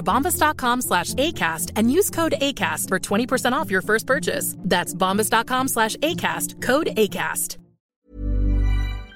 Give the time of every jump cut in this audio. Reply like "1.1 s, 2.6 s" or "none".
7.9 s